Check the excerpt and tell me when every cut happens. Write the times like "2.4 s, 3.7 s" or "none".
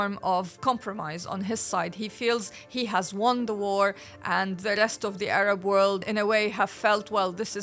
6.1 s